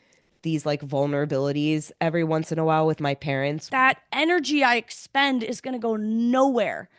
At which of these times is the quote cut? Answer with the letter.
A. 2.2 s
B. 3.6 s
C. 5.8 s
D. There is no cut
B